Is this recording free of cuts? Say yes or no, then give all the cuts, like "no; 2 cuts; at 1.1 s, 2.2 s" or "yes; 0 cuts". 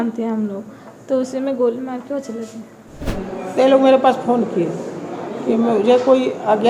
no; 1 cut; at 3.0 s